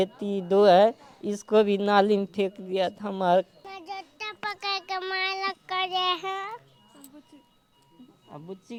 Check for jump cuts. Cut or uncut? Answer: uncut